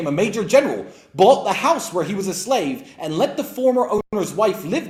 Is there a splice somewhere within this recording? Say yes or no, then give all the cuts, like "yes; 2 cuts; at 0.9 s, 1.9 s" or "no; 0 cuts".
no; 0 cuts